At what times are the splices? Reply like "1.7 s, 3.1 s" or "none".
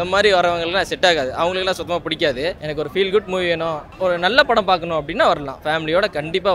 none